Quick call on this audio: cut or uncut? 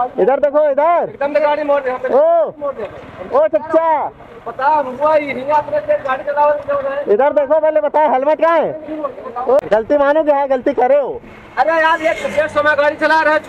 cut